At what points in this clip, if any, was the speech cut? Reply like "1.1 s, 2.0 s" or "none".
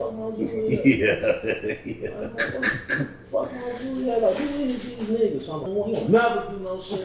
5.6 s